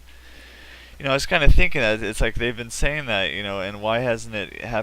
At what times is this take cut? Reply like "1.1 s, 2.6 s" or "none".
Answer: 1.0 s

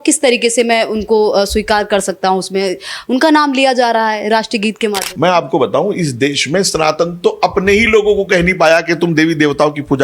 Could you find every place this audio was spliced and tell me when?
5.1 s

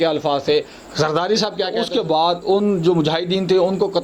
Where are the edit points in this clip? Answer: 1.8 s

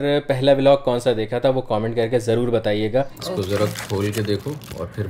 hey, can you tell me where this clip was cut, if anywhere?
3.2 s

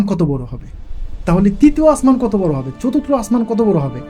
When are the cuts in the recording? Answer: none

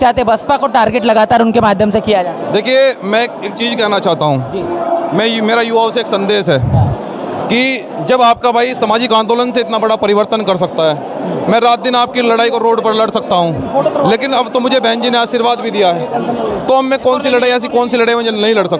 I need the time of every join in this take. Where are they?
none

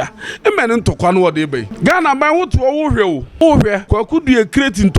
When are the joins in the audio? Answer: 1.7 s, 3.3 s, 3.8 s

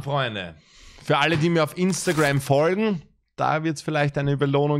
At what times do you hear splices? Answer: none

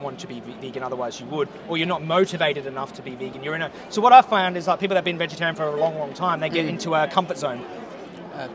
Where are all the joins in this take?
none

